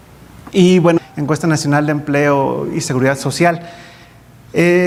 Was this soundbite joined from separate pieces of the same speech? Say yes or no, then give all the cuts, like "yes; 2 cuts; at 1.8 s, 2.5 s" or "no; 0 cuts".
no; 0 cuts